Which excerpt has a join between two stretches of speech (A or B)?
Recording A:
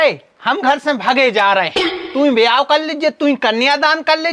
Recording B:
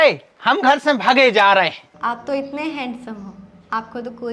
B